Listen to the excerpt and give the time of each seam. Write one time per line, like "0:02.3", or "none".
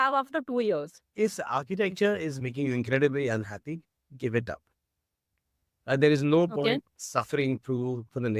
0:01.0